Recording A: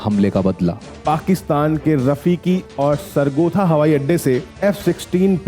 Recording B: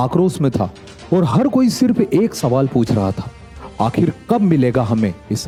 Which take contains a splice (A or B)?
A